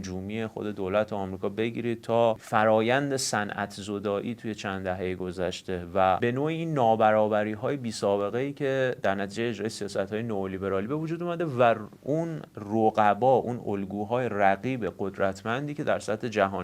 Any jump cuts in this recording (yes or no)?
yes